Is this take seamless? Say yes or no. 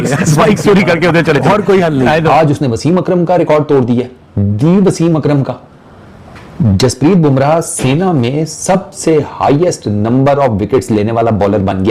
yes